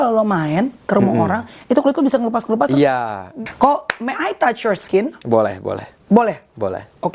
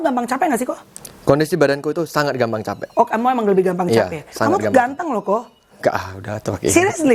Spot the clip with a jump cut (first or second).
first